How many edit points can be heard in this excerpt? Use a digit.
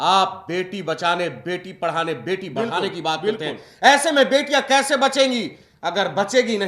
0